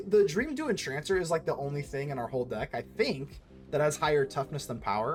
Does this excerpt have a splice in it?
no; 0 cuts

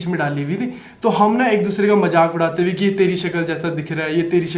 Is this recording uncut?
yes; 0 cuts

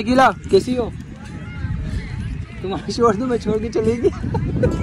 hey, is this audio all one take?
yes; 0 cuts

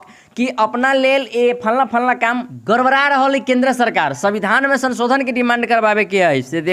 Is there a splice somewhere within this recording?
yes; 1 cut; at 2.5 s

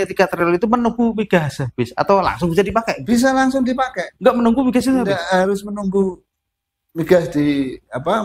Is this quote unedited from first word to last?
yes; 0 cuts

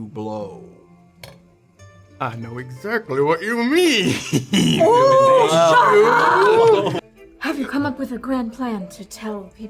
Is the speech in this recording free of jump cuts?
no; 1 cut; at 7.0 s

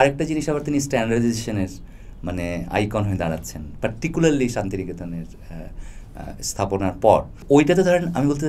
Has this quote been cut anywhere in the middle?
no; 0 cuts

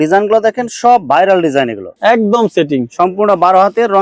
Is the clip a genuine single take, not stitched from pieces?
no; 1 cut; at 1.9 s

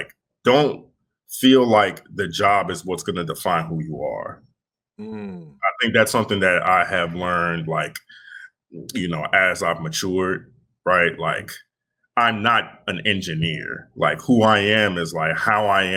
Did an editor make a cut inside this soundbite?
no; 0 cuts

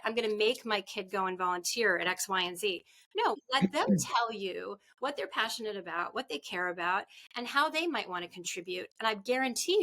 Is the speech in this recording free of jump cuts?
no; 1 cut; at 3.4 s

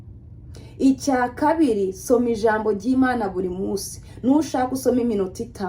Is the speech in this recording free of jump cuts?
yes; 0 cuts

